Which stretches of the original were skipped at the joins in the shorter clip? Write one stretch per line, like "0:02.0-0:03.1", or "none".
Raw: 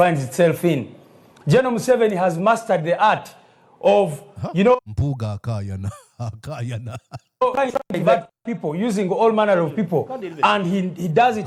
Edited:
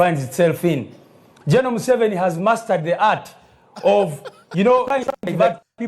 0:04.8-0:07.4

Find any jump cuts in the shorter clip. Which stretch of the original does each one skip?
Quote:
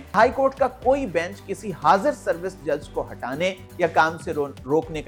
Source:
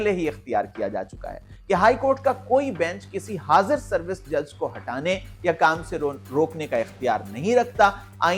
none

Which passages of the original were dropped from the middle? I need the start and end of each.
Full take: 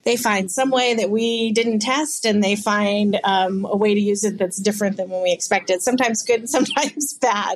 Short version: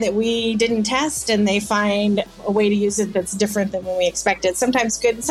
0:03.2-0:03.5

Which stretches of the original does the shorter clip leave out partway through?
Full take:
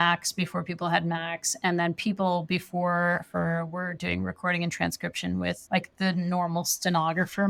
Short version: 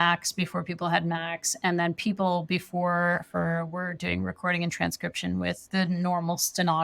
0:05.6-0:05.9

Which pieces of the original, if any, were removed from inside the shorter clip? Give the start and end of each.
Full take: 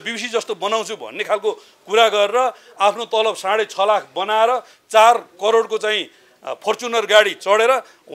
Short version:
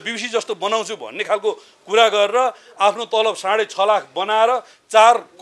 none

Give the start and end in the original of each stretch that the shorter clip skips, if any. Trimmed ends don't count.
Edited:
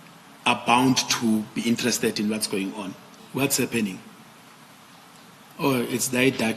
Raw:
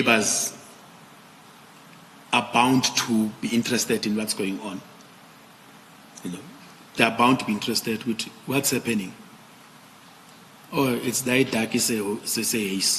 0:05.0-0:08.3

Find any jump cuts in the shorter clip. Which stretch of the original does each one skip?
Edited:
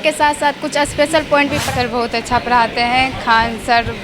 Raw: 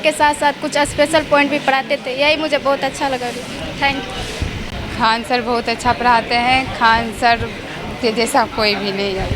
0:01.7-0:05.2

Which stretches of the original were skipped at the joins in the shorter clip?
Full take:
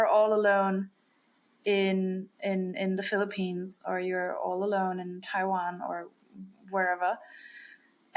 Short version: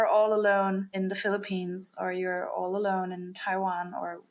0:00.9-0:02.8

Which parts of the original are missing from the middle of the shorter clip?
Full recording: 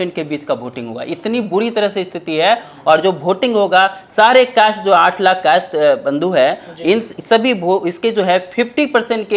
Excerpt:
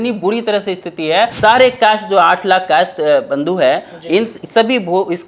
0:02.6-0:04.1

